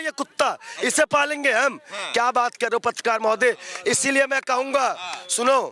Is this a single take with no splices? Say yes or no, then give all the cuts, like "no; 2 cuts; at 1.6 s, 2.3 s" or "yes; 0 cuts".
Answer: yes; 0 cuts